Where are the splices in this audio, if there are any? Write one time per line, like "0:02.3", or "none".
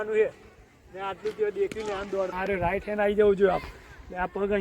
0:02.3